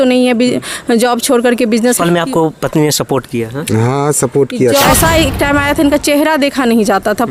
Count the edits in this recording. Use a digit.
2